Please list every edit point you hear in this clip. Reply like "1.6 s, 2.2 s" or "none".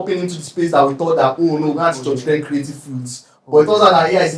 none